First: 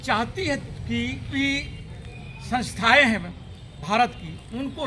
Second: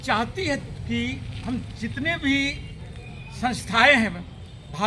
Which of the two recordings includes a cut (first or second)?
first